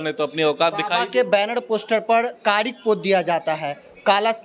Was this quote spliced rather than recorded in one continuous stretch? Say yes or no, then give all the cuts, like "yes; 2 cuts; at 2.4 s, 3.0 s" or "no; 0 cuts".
no; 0 cuts